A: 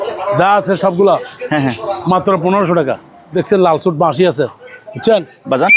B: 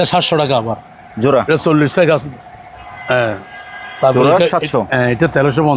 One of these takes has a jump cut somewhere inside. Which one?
A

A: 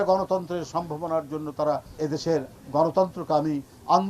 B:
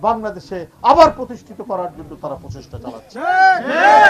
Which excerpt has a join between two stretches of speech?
A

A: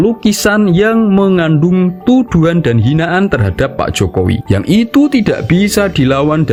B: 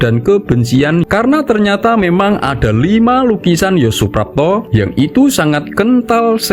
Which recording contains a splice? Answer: B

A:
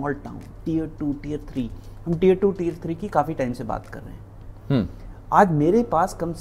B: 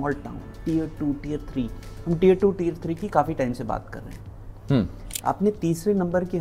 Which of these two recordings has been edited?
B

